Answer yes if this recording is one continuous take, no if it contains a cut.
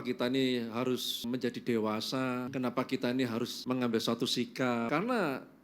no